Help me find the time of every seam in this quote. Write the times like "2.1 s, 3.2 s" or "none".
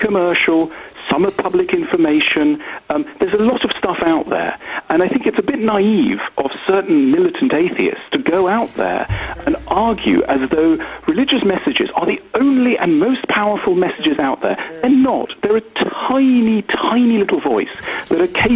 none